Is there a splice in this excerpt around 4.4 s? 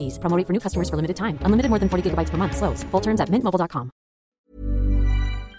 yes; 1 cut; at 4.4 s

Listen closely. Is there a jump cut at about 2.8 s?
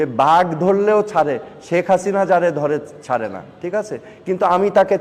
no; 0 cuts

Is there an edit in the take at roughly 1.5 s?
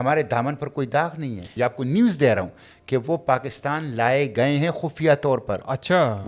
yes; 1 cut; at 1.5 s

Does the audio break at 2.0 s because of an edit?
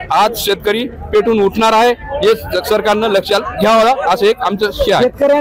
no; 0 cuts

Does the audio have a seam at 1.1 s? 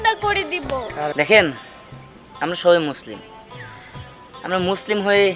yes; 1 cut; at 1.1 s

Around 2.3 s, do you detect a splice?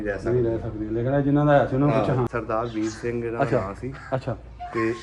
yes; 1 cut; at 2.3 s

